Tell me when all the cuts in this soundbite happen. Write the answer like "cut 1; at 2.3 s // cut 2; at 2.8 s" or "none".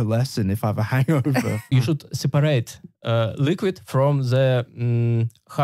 cut 1; at 1.7 s